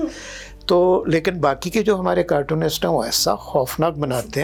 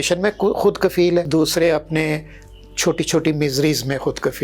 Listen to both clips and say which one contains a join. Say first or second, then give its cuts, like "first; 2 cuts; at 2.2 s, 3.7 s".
second; 1 cut; at 1.3 s